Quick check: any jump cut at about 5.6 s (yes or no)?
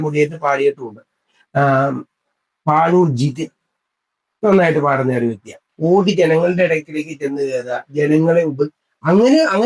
yes